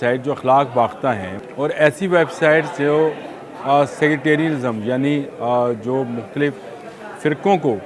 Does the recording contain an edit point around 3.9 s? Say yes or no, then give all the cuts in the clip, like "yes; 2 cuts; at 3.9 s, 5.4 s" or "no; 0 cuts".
no; 1 cut; at 1.3 s